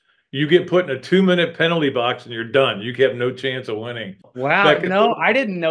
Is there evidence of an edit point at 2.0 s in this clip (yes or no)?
no